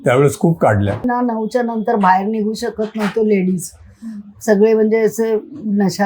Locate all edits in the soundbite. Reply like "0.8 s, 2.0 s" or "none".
1.0 s